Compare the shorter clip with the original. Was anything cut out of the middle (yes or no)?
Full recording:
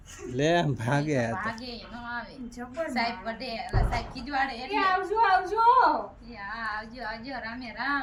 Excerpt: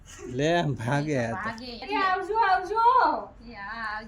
yes